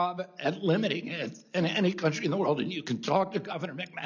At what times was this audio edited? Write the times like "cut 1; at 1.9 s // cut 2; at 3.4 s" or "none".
none